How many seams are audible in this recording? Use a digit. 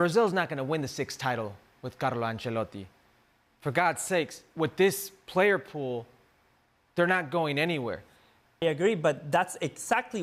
1